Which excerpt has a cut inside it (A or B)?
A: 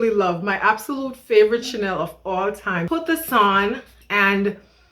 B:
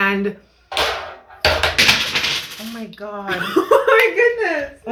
A